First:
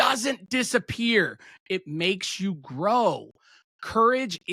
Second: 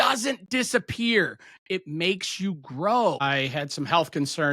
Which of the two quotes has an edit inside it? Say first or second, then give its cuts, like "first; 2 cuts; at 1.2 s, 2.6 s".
second; 1 cut; at 3.2 s